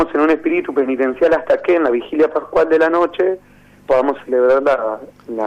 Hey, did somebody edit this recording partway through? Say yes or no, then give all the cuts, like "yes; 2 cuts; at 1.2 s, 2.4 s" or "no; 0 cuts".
yes; 1 cut; at 1.1 s